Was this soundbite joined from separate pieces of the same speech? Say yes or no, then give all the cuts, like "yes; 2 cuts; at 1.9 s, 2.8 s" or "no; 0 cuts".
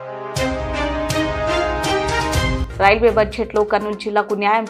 yes; 1 cut; at 2.6 s